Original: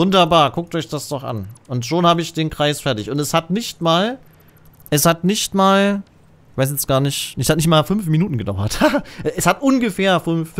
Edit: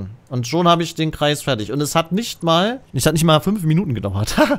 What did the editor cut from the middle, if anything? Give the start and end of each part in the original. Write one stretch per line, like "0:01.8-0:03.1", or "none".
0:04.2-0:07.3